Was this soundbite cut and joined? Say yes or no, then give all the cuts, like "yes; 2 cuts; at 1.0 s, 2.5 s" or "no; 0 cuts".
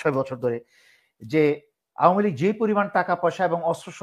no; 0 cuts